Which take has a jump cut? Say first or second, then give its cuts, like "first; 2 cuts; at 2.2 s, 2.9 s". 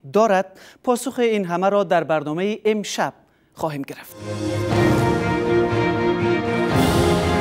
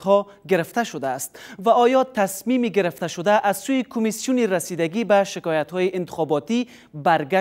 first; 1 cut; at 4.3 s